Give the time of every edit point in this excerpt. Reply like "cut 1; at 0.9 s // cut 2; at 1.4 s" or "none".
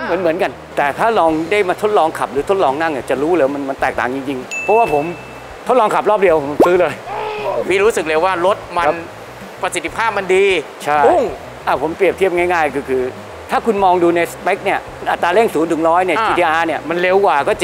none